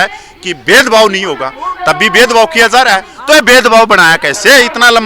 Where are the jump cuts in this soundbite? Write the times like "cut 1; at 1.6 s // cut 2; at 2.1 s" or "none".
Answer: cut 1; at 3.1 s